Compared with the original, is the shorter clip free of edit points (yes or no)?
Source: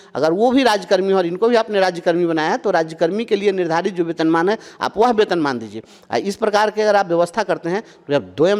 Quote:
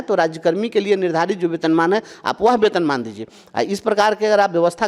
yes